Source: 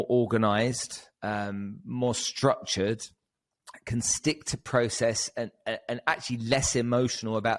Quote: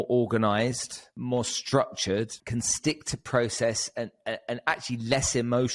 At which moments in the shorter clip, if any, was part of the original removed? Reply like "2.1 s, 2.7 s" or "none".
1.0 s, 2.4 s